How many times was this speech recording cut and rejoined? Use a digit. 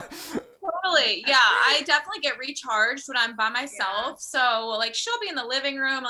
0